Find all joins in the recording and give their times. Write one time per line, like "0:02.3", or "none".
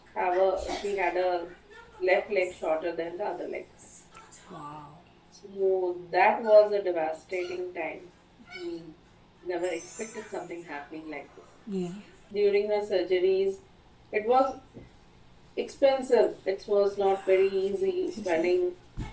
0:12.3